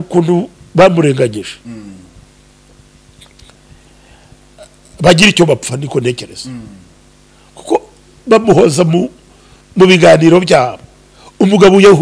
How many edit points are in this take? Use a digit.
0